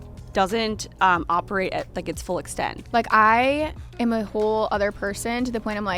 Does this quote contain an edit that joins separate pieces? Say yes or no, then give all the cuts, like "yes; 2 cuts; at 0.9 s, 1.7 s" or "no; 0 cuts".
yes; 1 cut; at 2.8 s